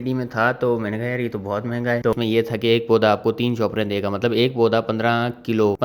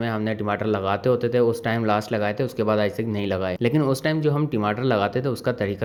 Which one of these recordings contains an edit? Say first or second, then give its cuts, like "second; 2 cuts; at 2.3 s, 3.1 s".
first; 1 cut; at 2.1 s